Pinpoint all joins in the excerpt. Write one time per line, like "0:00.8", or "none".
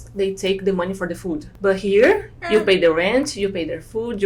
0:01.4